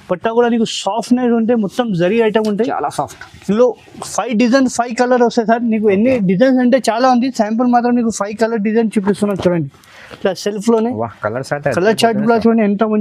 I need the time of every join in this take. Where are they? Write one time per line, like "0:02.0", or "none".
none

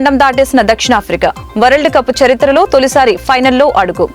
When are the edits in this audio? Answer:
none

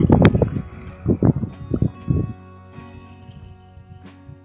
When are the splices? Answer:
0:02.4

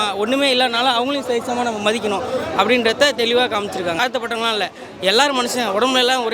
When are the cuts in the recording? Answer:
0:04.0

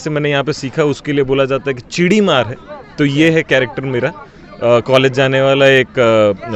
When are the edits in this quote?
none

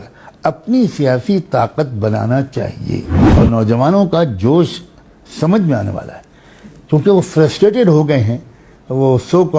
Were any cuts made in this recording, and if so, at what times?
0:03.2

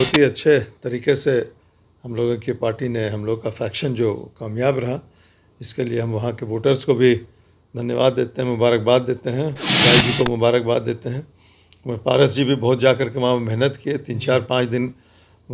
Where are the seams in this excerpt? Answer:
none

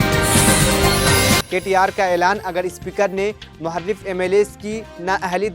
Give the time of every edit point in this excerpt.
0:01.4

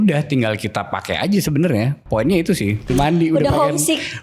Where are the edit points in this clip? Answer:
0:02.9

